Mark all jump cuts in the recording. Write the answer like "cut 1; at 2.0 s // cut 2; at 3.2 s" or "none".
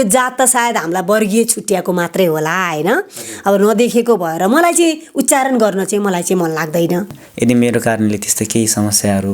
cut 1; at 7.2 s